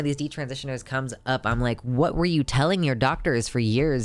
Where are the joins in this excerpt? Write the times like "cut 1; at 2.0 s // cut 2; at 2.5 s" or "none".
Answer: none